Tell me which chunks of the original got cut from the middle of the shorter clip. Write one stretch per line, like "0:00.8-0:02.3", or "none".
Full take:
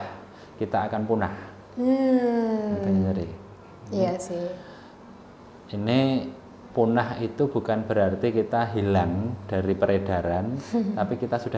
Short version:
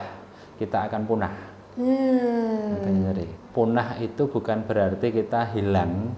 0:03.4-0:06.6